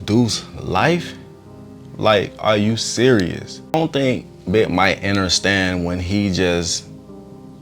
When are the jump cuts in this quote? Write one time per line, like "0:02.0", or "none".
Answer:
0:03.6